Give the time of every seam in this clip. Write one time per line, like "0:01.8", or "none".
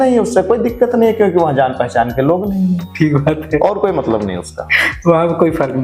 none